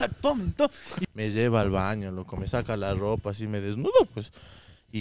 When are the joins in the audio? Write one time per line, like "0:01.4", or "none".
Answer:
0:00.9